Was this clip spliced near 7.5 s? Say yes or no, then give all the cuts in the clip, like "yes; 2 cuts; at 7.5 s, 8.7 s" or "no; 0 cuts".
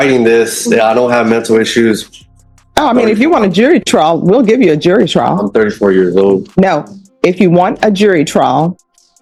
no; 0 cuts